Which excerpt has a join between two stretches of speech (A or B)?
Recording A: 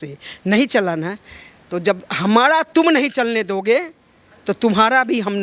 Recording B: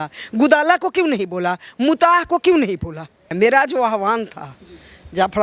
B